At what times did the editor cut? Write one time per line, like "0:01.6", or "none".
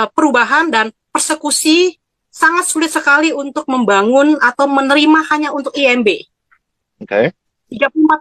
none